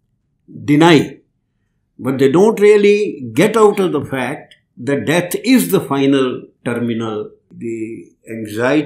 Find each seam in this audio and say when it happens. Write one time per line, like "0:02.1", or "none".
0:07.5